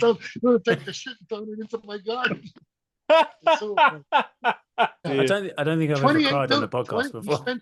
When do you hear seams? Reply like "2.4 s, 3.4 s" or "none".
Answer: 5.1 s

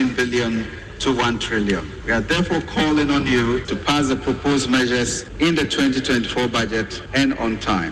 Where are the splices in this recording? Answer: 1.9 s, 3.7 s, 5.2 s, 7.0 s

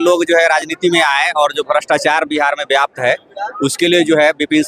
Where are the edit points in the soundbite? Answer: none

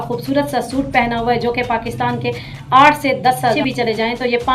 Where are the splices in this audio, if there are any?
3.6 s

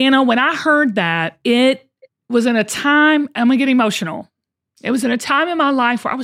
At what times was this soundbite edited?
1.3 s

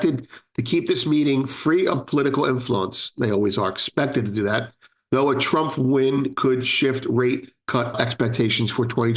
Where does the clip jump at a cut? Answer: 7.9 s

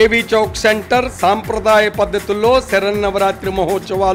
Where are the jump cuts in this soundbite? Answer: none

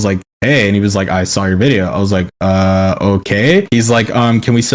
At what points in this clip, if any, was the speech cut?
none

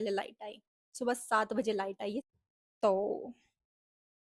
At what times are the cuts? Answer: 2.3 s

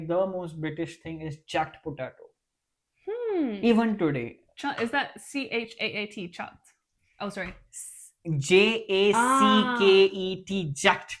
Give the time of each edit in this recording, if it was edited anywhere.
none

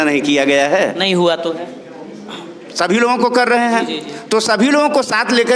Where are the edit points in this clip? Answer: none

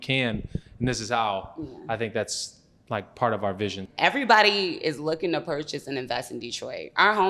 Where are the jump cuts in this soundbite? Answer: 3.8 s

